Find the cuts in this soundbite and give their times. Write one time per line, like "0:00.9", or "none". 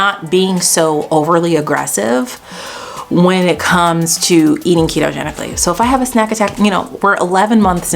none